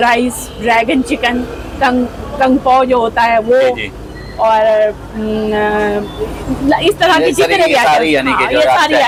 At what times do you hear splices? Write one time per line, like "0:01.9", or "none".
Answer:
none